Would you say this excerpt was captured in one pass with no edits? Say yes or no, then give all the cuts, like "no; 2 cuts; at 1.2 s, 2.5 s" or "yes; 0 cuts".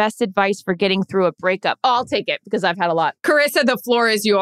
no; 1 cut; at 3.2 s